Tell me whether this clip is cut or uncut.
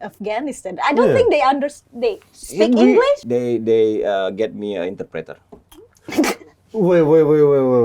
cut